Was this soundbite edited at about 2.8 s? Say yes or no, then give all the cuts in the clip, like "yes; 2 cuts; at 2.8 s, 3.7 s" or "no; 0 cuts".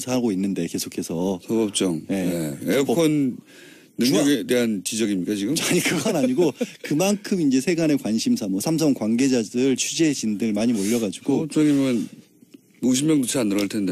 no; 1 cut; at 9.4 s